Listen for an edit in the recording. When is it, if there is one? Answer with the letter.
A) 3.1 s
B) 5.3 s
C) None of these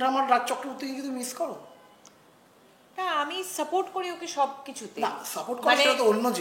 C